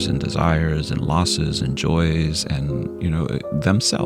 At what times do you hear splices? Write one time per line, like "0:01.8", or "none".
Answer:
none